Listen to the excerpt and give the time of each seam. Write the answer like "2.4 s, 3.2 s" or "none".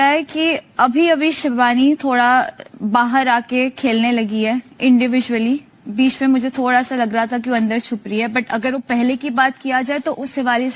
none